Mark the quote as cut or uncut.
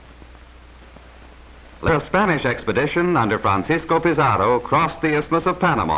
cut